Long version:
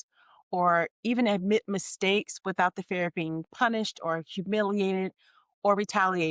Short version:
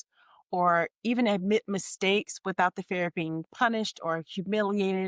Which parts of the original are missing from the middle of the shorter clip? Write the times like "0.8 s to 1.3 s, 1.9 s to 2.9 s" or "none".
none